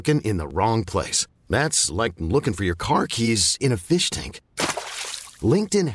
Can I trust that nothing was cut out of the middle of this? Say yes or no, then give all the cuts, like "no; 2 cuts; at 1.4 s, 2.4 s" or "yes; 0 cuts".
yes; 0 cuts